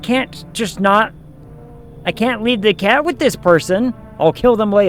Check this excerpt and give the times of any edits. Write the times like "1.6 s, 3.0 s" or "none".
none